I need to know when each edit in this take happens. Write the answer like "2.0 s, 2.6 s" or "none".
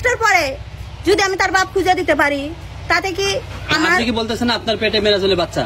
none